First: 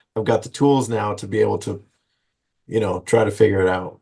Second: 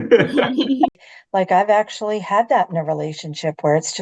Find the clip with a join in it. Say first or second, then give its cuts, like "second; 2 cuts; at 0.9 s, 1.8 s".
second; 1 cut; at 1.0 s